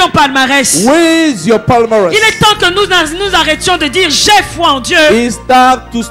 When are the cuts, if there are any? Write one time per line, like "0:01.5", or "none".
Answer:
none